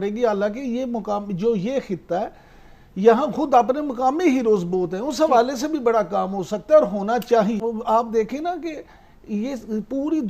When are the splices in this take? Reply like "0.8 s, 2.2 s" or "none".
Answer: 7.6 s